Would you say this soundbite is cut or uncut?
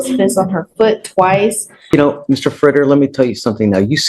cut